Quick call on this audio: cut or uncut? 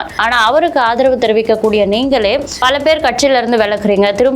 cut